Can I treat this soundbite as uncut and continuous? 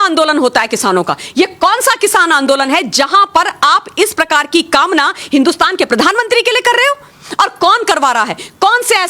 yes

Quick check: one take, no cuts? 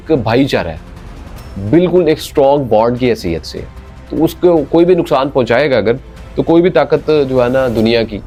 yes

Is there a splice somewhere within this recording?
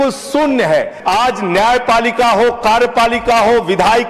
yes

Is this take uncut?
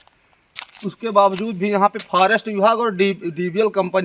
yes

